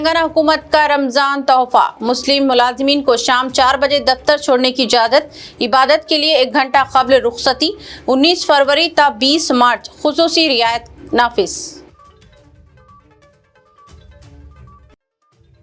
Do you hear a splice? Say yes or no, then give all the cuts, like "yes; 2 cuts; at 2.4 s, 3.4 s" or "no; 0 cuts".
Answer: no; 0 cuts